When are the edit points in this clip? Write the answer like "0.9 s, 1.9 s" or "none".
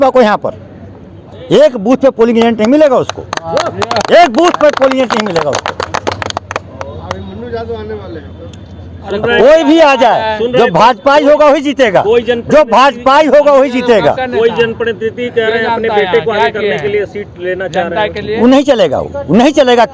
none